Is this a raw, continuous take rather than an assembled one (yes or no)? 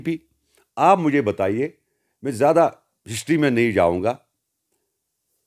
yes